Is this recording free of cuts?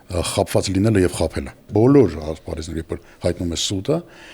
no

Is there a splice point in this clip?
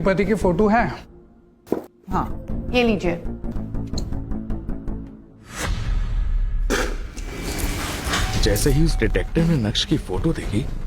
yes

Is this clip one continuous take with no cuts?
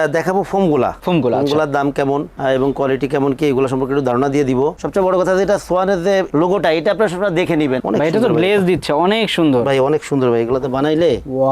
no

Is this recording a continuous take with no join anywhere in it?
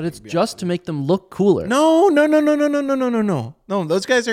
yes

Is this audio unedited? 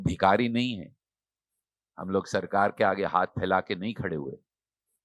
yes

